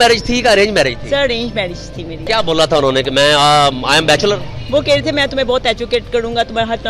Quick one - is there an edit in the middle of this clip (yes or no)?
yes